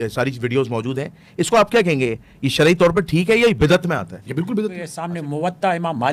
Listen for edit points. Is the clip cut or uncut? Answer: cut